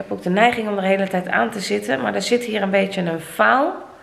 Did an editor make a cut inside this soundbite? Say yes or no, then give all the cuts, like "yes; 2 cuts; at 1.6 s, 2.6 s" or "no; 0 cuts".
no; 0 cuts